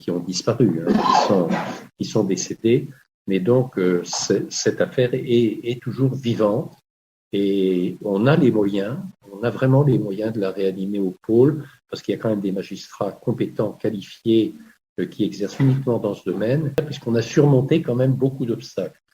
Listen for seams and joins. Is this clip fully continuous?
no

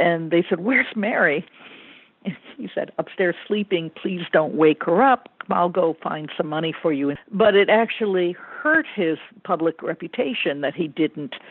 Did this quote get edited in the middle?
yes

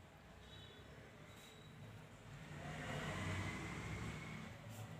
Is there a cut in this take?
no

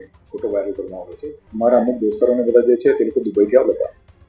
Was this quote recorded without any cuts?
no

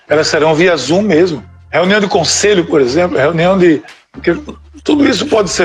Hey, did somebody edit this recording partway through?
no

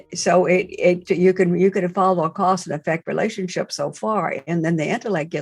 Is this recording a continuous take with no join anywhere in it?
no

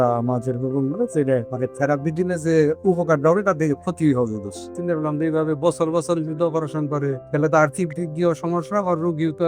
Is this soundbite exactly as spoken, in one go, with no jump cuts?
no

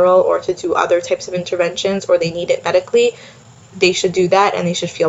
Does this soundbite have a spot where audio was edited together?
no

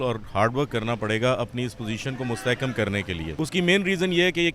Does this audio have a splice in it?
yes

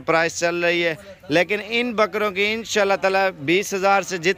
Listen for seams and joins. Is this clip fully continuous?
yes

